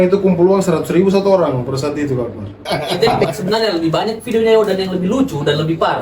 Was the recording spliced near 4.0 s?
no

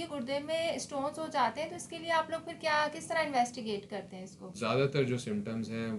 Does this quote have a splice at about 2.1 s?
no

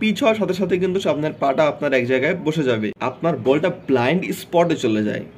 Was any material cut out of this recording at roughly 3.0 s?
yes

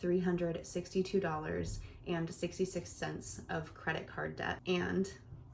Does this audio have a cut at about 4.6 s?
yes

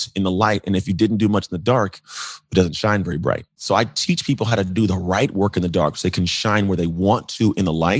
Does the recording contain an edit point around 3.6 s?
yes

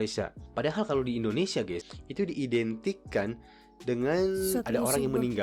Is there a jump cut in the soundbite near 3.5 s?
no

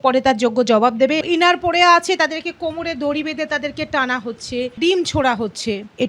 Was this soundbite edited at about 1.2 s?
yes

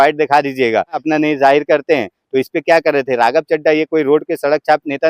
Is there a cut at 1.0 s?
yes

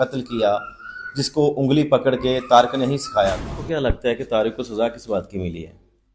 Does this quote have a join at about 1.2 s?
no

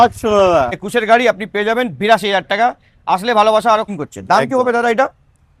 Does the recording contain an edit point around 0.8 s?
yes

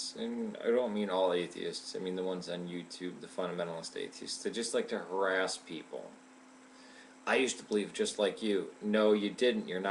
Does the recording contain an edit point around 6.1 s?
yes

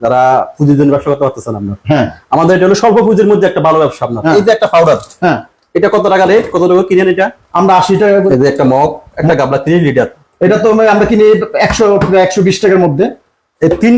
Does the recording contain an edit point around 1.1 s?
no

